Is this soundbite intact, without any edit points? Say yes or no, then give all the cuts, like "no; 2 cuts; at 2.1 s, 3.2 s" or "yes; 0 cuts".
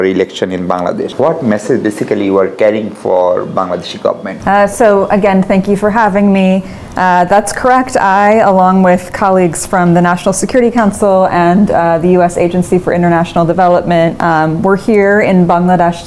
no; 3 cuts; at 1.1 s, 4.3 s, 14.2 s